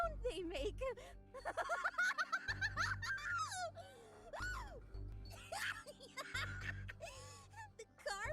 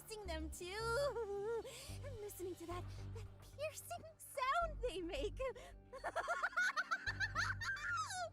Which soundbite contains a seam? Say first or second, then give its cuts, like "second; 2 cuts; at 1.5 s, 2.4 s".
first; 1 cut; at 5.2 s